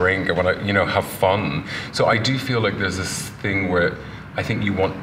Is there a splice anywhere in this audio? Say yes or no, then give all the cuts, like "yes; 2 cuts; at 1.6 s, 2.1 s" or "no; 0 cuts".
no; 0 cuts